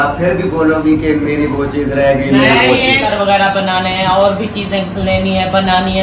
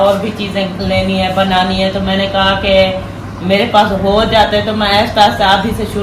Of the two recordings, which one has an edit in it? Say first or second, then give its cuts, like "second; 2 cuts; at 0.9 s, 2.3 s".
first; 1 cut; at 3.1 s